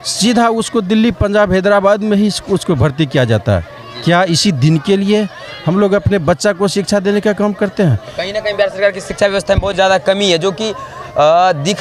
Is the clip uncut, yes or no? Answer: yes